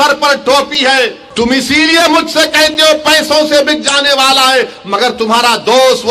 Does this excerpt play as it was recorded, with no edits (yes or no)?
no